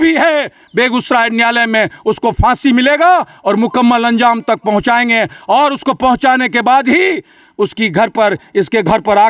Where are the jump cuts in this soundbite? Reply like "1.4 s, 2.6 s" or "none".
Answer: none